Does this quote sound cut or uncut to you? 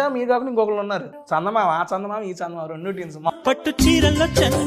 cut